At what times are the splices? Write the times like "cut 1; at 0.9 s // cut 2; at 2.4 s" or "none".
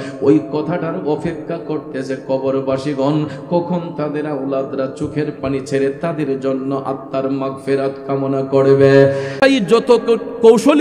cut 1; at 9.3 s